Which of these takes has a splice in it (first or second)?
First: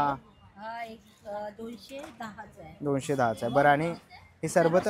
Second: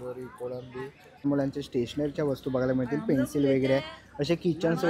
second